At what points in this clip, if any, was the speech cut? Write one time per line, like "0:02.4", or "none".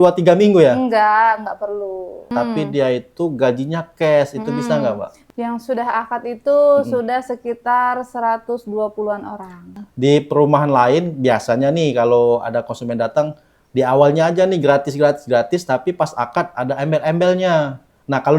0:02.3
0:05.1
0:09.8